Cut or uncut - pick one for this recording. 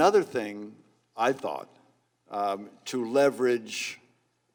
uncut